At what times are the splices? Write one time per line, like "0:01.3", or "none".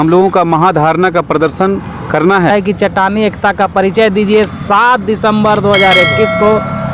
0:02.5